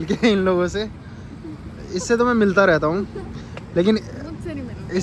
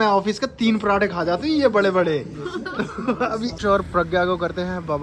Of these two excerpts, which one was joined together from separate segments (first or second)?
second